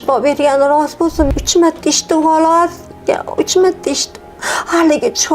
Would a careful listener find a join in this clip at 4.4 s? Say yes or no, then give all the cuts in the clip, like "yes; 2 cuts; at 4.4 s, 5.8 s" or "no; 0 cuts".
no; 1 cut; at 1.3 s